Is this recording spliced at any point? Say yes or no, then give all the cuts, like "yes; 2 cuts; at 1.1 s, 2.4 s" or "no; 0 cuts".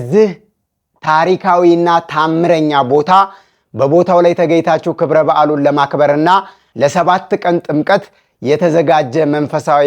yes; 1 cut; at 6.6 s